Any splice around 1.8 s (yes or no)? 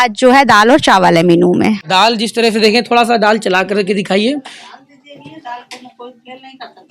yes